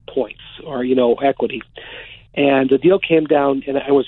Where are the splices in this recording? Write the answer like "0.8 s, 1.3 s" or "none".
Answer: none